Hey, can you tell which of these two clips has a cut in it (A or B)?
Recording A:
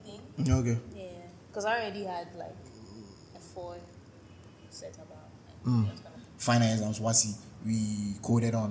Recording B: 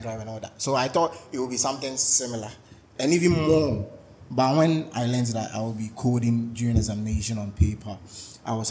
A